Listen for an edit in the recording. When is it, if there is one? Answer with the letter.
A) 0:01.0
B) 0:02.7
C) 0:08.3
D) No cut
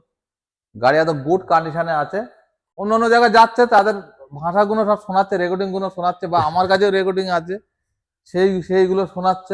B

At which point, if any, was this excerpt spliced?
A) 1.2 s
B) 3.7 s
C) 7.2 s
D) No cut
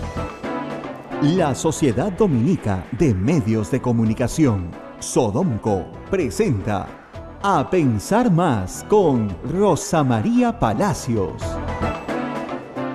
A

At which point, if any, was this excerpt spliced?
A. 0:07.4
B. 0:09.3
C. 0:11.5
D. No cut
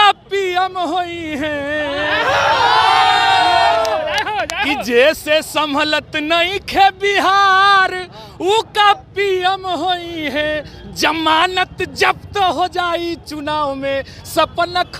D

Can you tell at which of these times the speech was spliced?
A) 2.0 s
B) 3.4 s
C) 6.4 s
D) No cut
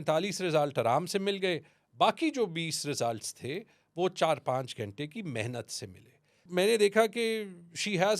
C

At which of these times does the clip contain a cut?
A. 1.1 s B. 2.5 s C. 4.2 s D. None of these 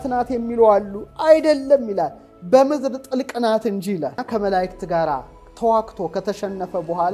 C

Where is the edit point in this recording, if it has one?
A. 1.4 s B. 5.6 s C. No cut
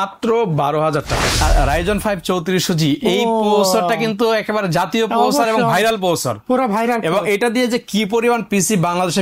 A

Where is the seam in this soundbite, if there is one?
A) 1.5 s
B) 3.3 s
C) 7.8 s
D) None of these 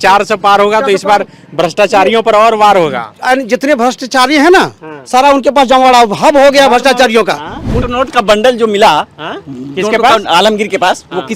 C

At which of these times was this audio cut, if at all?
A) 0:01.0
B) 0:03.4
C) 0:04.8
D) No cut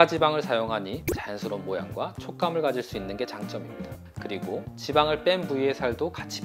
A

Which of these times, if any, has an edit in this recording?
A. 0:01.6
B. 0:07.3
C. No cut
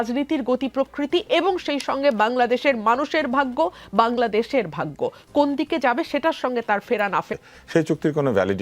B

